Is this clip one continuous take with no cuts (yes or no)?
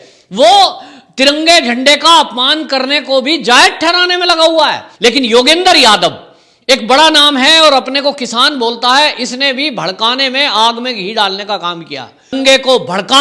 no